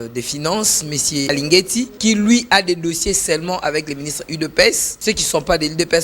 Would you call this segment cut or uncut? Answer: cut